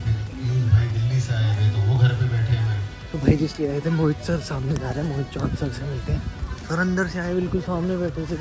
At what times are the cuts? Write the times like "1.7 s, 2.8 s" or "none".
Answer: none